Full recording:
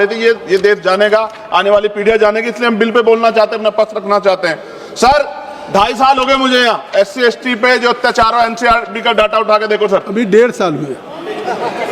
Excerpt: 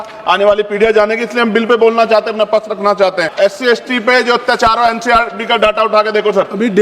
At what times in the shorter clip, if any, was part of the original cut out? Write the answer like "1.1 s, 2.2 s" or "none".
3.3 s